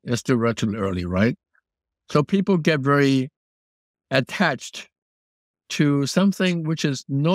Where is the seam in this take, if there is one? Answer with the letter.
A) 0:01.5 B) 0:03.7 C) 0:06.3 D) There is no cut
D